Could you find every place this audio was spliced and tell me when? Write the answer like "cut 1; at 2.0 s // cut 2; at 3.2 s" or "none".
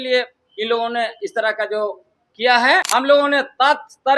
cut 1; at 2.9 s